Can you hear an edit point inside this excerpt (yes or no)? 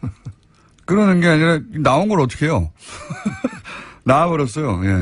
no